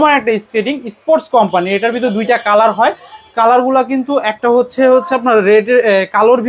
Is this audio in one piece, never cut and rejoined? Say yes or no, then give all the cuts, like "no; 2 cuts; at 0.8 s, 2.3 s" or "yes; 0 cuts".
yes; 0 cuts